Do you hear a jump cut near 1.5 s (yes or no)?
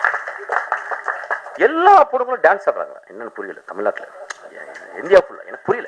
yes